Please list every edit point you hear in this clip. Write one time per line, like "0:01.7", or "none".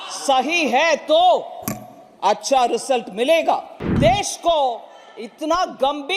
0:03.8